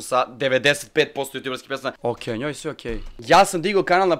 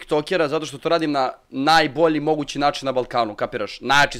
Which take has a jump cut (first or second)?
first